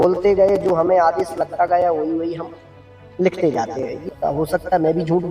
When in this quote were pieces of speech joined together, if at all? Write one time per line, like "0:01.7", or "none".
0:04.1